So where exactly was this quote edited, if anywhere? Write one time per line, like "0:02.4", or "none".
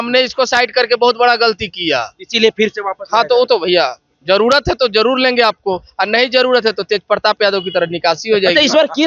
none